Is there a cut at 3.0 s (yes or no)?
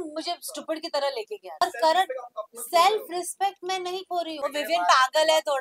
no